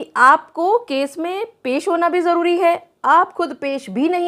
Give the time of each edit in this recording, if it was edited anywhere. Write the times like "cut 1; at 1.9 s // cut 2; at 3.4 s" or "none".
none